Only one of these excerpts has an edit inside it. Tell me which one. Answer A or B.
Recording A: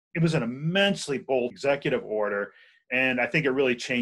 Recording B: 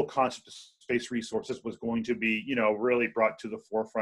A